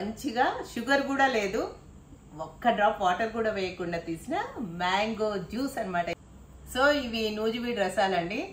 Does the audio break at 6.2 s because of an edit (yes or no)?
yes